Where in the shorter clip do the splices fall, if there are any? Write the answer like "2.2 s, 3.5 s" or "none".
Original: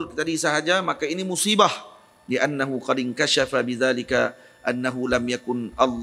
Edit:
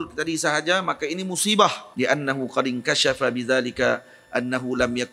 1.8 s